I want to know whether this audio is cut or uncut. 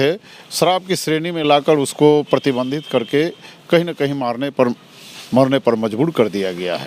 uncut